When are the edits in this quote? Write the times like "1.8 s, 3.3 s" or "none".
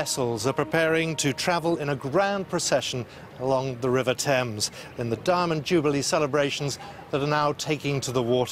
none